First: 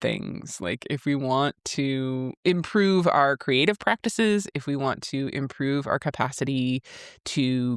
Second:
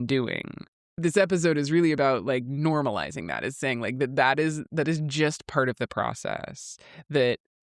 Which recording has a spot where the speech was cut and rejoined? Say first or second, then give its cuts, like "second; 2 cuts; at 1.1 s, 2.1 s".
second; 1 cut; at 1.0 s